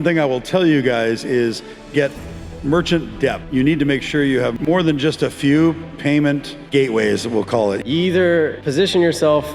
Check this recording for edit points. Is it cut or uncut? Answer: cut